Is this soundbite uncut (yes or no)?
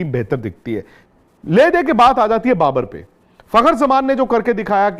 no